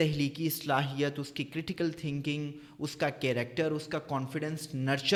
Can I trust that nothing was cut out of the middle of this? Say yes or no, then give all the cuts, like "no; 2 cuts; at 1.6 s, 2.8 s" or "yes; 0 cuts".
yes; 0 cuts